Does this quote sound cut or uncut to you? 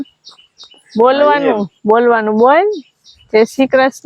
uncut